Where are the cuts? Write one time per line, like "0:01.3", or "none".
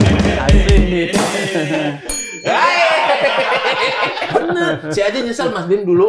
0:04.2

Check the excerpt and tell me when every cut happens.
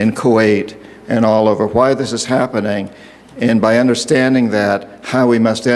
0:02.4

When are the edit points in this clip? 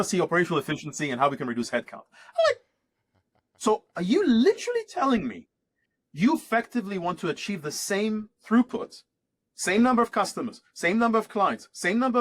none

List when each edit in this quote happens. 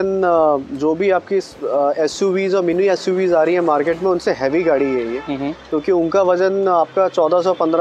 none

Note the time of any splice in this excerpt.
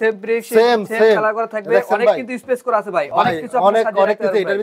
none

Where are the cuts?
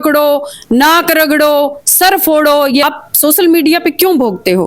0:02.8

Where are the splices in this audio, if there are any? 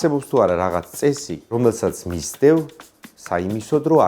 0:01.5

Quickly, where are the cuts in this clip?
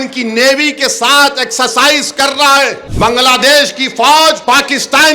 0:02.8
0:04.4

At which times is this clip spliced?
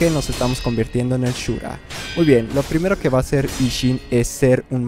none

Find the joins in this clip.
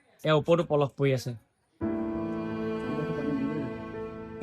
0:01.7

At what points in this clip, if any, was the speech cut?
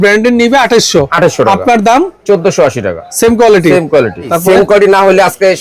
0:04.3

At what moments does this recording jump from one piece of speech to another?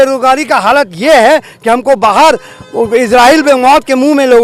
none

